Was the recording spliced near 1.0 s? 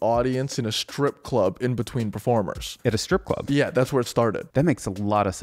no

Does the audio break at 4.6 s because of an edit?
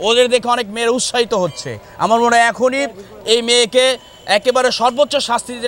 no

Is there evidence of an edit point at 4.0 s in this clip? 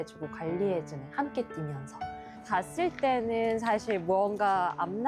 no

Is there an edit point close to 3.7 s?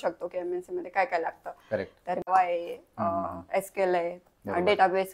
no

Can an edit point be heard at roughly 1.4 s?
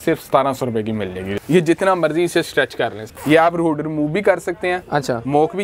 yes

